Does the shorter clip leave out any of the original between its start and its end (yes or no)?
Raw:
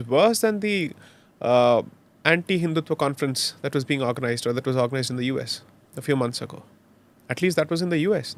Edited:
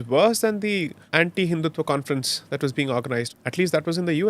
yes